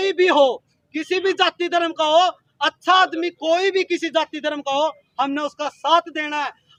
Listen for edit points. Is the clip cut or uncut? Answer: uncut